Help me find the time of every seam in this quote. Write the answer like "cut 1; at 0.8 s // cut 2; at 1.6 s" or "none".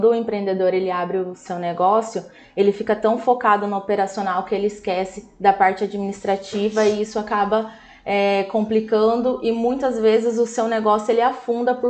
none